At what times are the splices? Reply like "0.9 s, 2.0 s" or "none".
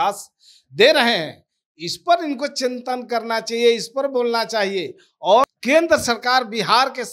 5.4 s